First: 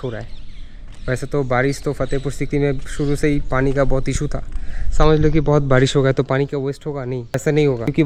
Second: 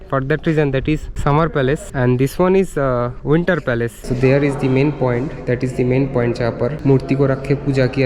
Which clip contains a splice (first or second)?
second